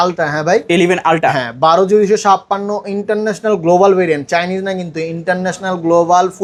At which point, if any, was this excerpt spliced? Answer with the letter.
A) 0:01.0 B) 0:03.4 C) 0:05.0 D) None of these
D